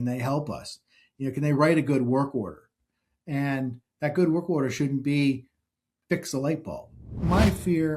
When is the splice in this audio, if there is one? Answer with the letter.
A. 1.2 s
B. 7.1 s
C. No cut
B